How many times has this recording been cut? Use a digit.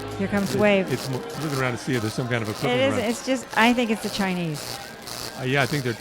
1